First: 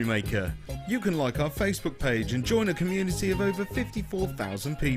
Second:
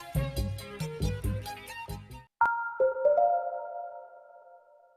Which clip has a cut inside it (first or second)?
second